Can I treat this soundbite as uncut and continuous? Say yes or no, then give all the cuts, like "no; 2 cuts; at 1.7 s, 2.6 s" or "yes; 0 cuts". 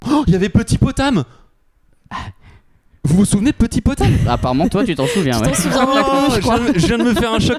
yes; 0 cuts